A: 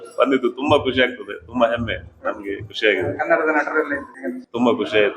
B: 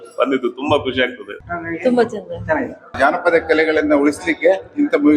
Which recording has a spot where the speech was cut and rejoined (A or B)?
B